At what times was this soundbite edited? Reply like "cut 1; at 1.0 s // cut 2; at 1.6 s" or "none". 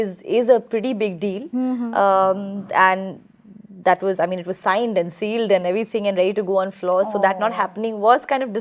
none

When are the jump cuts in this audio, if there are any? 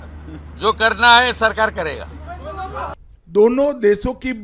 cut 1; at 3.1 s

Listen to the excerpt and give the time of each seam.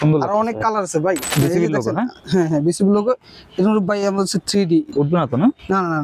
cut 1; at 1.2 s // cut 2; at 4.9 s

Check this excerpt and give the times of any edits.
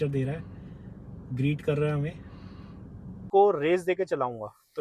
cut 1; at 3.2 s

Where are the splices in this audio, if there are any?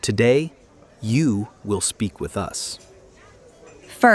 none

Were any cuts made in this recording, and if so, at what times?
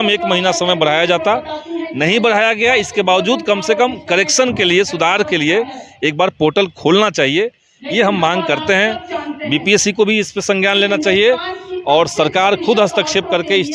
none

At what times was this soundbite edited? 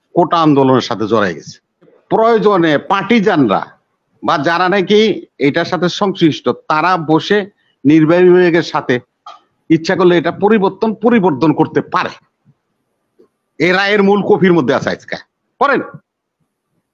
cut 1; at 2.0 s

